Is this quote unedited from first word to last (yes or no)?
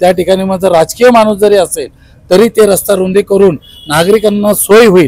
yes